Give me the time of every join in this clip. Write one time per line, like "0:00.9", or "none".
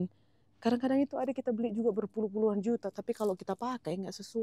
none